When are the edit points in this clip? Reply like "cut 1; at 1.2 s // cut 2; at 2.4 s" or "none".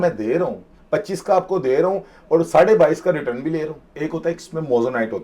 cut 1; at 3.9 s